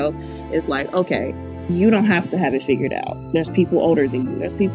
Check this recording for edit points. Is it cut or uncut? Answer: cut